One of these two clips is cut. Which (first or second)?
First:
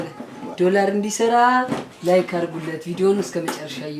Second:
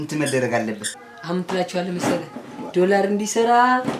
second